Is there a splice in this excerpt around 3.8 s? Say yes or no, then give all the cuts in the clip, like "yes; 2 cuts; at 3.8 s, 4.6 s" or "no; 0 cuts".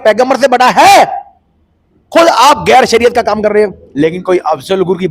yes; 1 cut; at 3.8 s